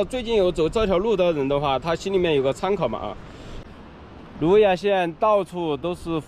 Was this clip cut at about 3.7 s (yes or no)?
yes